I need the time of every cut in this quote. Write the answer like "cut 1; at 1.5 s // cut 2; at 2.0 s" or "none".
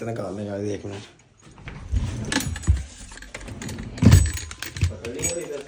cut 1; at 1.8 s